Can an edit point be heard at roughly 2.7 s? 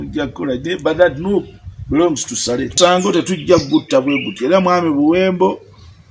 yes; 1 cut; at 2.7 s

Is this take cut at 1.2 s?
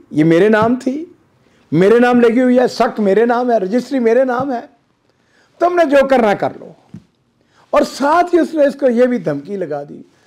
no; 0 cuts

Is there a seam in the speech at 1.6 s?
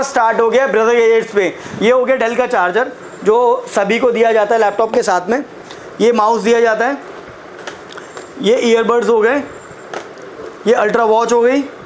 yes; 1 cut; at 1.6 s

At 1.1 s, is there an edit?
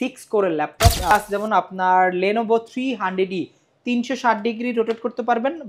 yes; 1 cut; at 1.1 s

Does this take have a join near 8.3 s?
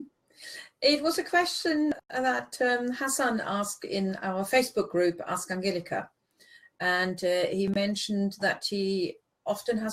no; 1 cut; at 6.4 s

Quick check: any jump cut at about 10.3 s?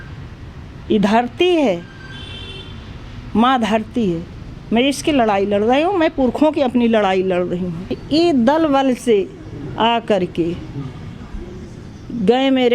no; 1 cut; at 8.0 s

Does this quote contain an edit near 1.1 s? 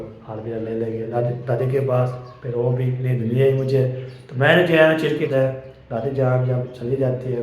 yes; 2 cuts; at 1.1 s, 5.3 s

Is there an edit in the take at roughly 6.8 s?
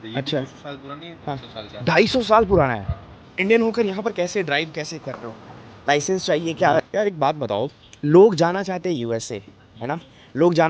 yes; 2 cuts; at 3.2 s, 6.8 s

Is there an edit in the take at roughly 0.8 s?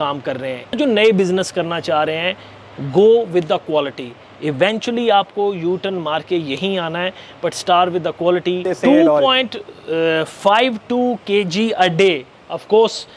yes; 2 cuts; at 0.8 s, 8.7 s

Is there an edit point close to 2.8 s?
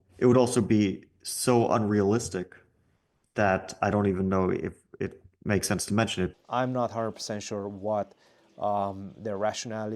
no; 1 cut; at 6.3 s

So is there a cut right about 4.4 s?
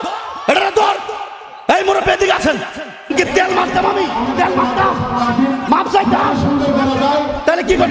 no; 1 cut; at 3.1 s

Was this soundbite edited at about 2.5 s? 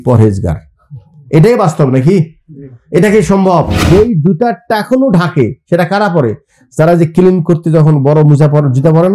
no; 1 cut; at 3.8 s

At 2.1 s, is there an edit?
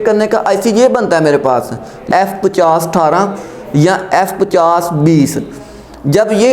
yes; 1 cut; at 2.1 s

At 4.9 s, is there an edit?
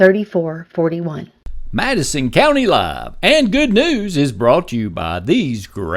no; 1 cut; at 1.3 s

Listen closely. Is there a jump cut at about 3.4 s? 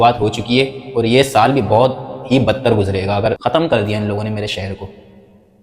yes; 1 cut; at 3.4 s

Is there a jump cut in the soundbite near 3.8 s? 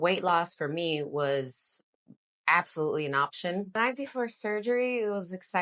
yes; 1 cut; at 3.8 s

